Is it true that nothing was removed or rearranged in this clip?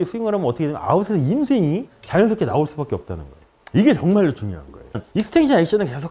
no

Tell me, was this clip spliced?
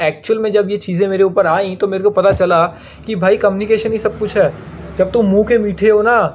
no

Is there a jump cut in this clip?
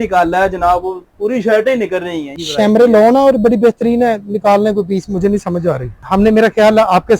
yes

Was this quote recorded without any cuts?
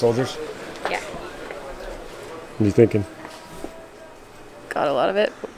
no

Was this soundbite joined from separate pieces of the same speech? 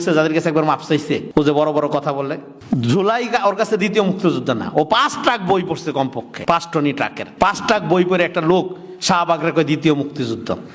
yes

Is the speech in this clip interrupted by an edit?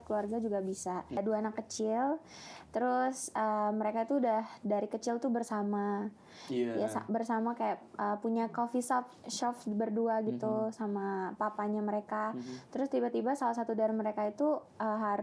yes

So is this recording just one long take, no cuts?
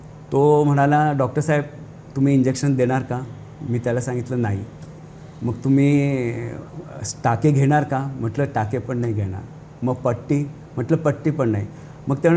yes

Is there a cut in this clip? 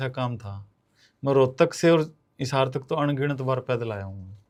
no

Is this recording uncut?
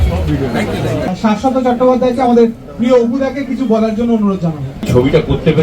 no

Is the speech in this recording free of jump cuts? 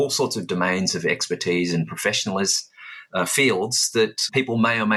yes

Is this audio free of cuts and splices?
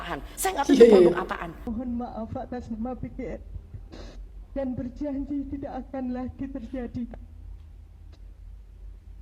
no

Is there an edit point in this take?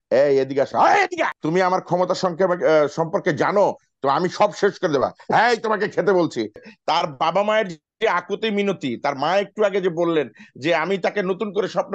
yes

